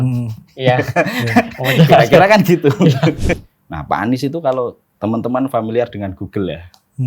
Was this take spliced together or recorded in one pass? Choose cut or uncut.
cut